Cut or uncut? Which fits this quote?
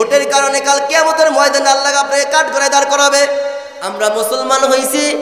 cut